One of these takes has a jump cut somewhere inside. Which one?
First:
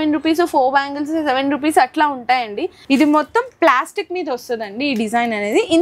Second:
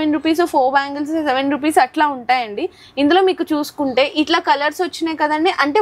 first; 1 cut; at 2.7 s

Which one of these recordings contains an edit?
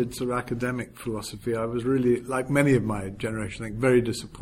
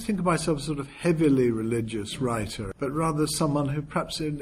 second; 1 cut; at 2.7 s

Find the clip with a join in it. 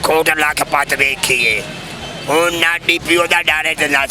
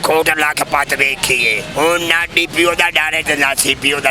second; 1 cut; at 1.6 s

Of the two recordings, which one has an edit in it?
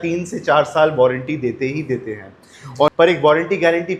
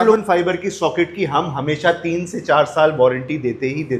first; 1 cut; at 2.9 s

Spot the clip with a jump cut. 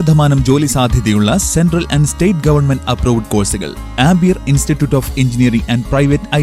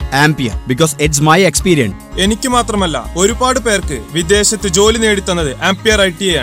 second; 1 cut; at 2.0 s

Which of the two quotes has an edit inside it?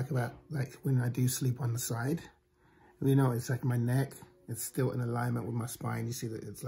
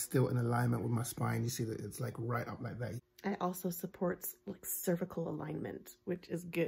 second; 1 cut; at 3.0 s

